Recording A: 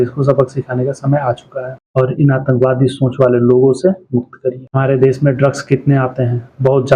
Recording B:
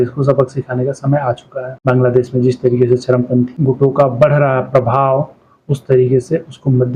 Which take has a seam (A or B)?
A